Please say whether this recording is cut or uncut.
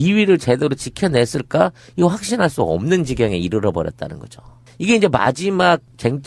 uncut